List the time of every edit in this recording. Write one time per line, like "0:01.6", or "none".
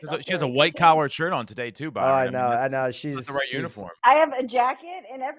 0:04.0